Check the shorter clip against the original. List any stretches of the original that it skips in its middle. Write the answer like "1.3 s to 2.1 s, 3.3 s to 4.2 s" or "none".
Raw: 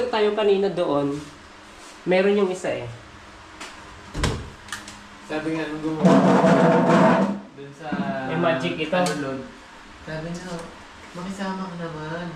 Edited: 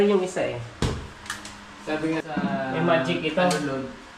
3.1 s to 4.2 s, 5.7 s to 7.8 s